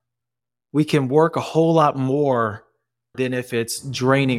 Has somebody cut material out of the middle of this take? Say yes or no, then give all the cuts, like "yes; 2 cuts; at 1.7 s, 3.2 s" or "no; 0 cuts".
yes; 1 cut; at 3.1 s